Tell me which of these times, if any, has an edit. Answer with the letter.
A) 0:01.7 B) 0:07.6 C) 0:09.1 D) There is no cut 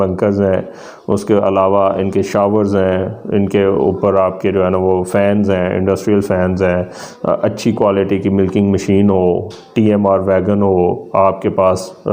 D